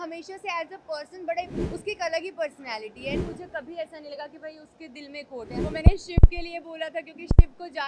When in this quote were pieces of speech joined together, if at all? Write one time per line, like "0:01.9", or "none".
0:01.6
0:03.2
0:05.6